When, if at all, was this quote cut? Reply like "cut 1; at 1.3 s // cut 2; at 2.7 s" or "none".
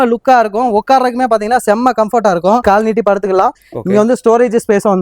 cut 1; at 2.6 s